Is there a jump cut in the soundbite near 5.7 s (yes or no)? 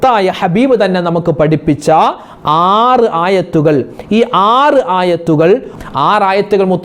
yes